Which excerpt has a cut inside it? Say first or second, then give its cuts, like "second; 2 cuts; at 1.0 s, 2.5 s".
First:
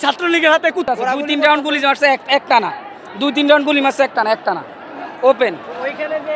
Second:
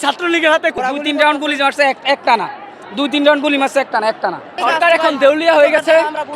second; 2 cuts; at 0.7 s, 4.6 s